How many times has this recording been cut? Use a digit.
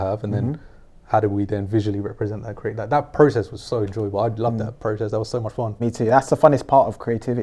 1